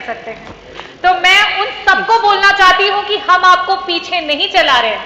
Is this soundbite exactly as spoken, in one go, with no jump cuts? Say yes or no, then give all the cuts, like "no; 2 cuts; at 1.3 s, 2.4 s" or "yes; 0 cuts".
yes; 0 cuts